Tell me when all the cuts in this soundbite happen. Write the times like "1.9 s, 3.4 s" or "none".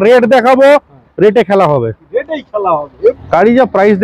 3.1 s

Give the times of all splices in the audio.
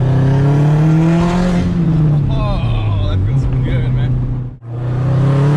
4.7 s

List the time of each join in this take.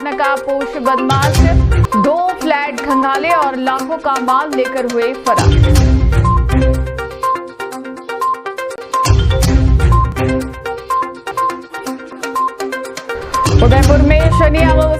none

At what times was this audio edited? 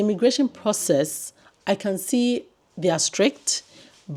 none

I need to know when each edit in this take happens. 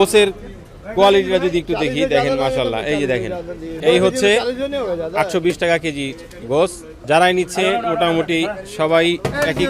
3.8 s, 6.9 s

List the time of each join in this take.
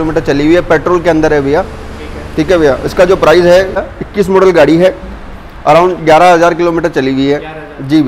3.8 s

